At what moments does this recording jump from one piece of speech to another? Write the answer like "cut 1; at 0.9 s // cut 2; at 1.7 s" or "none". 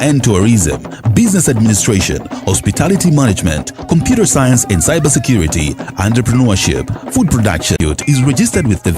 cut 1; at 7.8 s